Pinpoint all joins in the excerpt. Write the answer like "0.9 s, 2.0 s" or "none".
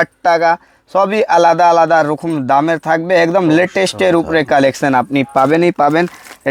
none